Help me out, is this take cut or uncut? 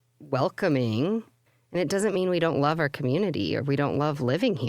cut